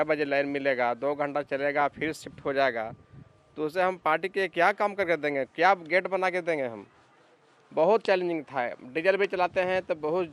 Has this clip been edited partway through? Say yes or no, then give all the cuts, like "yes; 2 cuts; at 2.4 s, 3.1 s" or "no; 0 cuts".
no; 0 cuts